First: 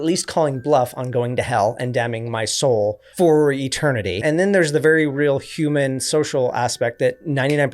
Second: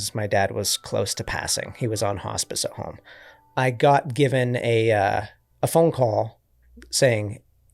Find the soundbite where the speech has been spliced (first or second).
first